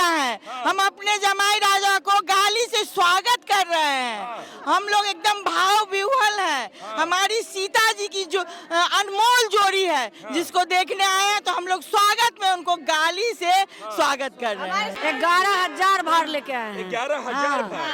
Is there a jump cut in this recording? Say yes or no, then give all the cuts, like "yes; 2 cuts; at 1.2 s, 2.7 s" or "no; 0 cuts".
yes; 1 cut; at 14.9 s